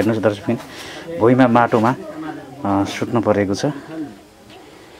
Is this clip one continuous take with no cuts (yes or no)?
yes